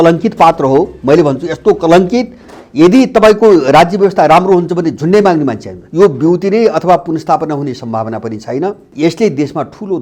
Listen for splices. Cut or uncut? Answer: cut